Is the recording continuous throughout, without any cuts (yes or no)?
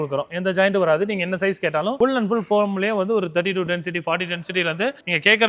yes